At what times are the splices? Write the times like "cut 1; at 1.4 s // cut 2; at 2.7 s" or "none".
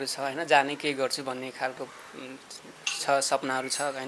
none